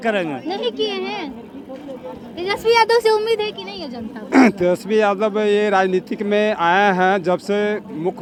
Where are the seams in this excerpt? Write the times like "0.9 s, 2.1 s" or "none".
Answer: none